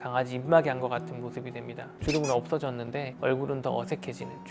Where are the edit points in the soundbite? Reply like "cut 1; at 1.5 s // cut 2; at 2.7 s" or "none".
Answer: none